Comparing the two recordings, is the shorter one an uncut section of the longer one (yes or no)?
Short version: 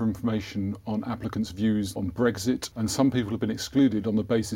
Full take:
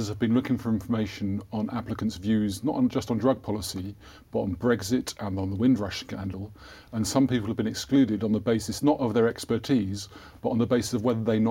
no